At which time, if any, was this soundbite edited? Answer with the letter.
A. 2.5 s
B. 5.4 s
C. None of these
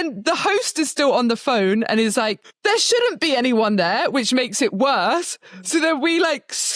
A